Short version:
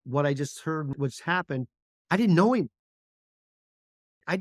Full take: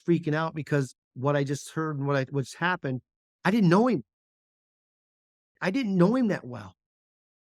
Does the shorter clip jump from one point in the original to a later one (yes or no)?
yes